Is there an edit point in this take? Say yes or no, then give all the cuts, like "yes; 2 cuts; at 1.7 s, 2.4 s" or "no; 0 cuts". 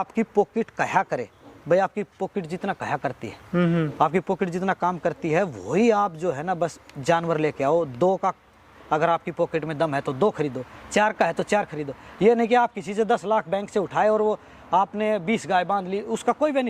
no; 0 cuts